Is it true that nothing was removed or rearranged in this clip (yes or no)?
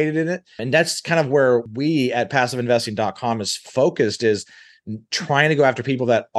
yes